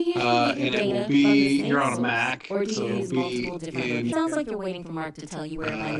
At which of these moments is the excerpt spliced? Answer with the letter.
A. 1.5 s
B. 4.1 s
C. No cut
B